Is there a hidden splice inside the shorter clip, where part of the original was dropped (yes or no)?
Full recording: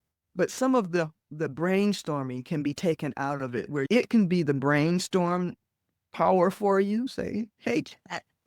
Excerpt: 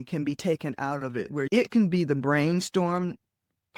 no